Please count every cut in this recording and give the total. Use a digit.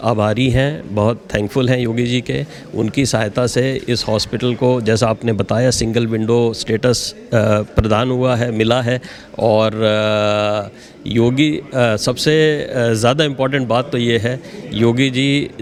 0